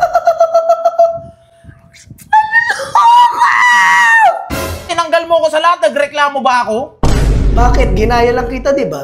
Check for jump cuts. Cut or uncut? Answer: cut